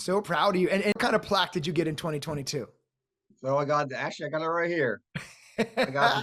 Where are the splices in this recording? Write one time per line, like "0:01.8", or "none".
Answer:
0:00.9